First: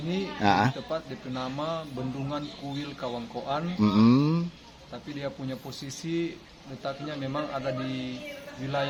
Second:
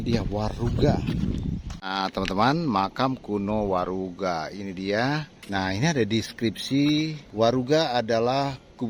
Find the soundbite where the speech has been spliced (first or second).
second